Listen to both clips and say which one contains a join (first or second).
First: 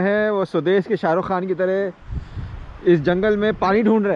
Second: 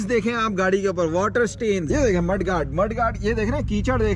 second